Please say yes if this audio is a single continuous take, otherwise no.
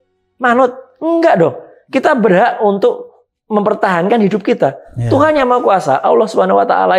yes